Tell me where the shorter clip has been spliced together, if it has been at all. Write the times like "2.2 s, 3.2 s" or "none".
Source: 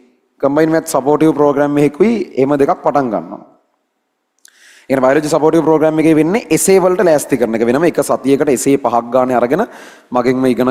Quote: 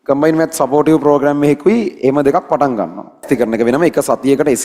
3.2 s